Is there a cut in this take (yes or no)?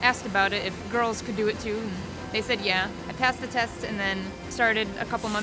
yes